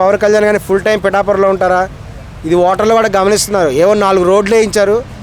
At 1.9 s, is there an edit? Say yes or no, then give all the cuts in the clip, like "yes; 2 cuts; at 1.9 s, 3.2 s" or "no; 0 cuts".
no; 0 cuts